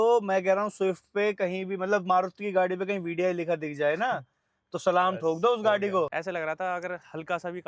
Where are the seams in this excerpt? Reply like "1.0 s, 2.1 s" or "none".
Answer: 6.2 s